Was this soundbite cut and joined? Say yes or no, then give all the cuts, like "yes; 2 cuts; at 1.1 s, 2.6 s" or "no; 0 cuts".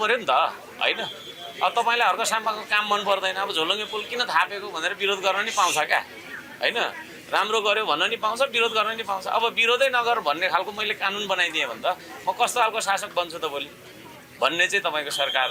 no; 0 cuts